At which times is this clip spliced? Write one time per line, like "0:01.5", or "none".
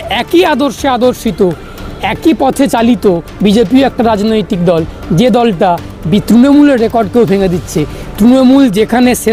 none